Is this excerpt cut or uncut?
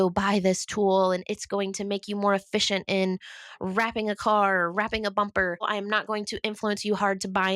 cut